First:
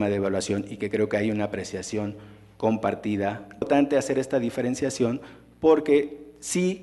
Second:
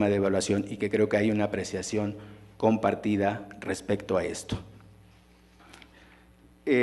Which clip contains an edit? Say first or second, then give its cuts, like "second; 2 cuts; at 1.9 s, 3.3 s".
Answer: second; 1 cut; at 3.5 s